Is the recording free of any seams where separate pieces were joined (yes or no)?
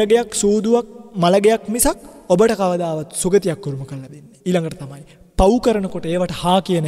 no